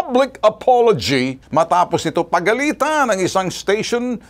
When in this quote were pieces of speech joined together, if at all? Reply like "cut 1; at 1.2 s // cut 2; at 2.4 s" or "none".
cut 1; at 1.4 s